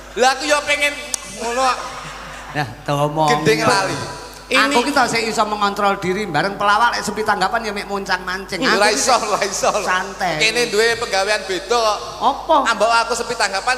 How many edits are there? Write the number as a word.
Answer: one